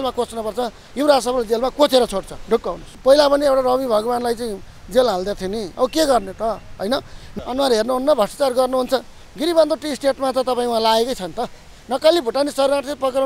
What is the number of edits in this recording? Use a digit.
2